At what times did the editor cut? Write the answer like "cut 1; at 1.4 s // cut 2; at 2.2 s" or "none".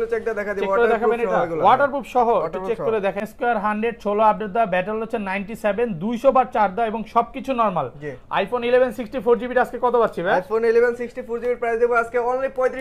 cut 1; at 3.2 s